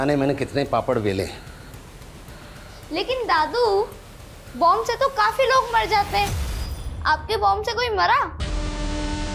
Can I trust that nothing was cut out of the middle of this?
yes; 0 cuts

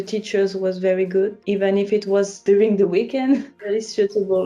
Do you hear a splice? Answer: yes; 3 cuts; at 1.4 s, 2.4 s, 3.5 s

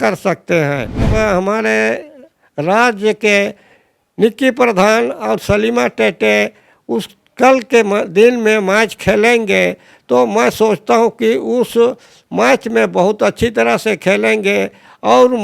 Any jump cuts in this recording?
yes; 1 cut; at 1.1 s

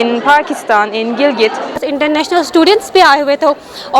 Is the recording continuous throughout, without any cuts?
no; 1 cut; at 1.8 s

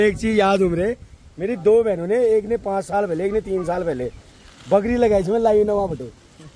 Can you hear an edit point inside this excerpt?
no; 0 cuts

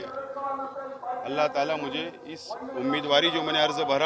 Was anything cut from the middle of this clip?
no; 0 cuts

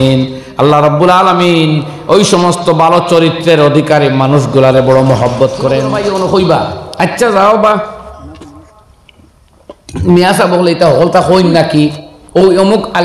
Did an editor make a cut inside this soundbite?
yes; 1 cut; at 6.1 s

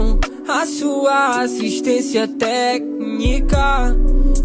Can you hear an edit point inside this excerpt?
no; 0 cuts

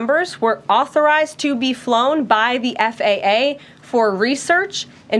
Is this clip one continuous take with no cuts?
yes; 0 cuts

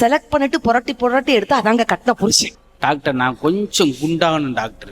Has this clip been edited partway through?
yes; 1 cut; at 2.6 s

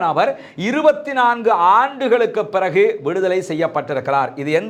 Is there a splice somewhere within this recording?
no; 0 cuts

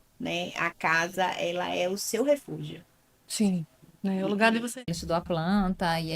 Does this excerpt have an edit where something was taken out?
yes; 1 cut; at 4.9 s

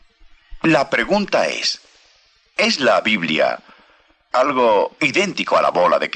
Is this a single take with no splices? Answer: no; 1 cut; at 4.0 s

